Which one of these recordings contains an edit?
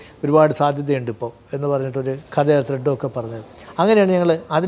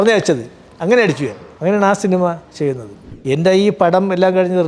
second; 2 cuts; at 1.4 s, 3.1 s

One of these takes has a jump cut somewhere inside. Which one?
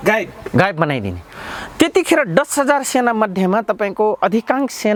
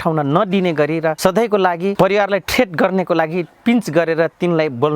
second; 2 cuts; at 1.2 s, 1.9 s

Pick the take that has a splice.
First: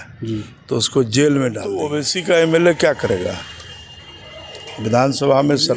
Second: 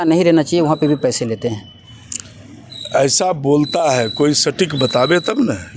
first; 1 cut; at 1.9 s

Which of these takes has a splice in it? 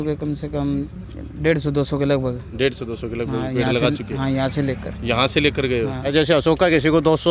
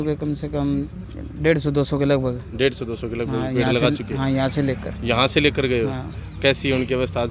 first; 1 cut; at 6.1 s

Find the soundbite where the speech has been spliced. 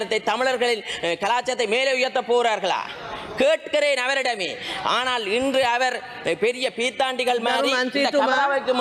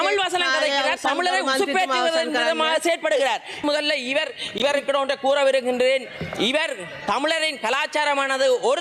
second; 1 cut; at 3.6 s

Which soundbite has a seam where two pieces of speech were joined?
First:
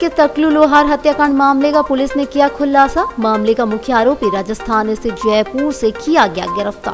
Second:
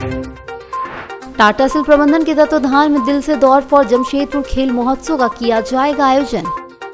second; 1 cut; at 1.2 s

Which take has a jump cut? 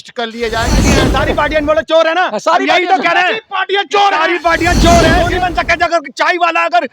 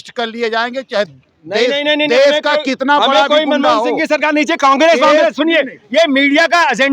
first; 2 cuts; at 0.8 s, 5.3 s

